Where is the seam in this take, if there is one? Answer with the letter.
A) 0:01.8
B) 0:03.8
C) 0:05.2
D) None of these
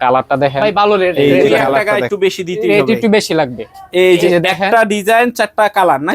A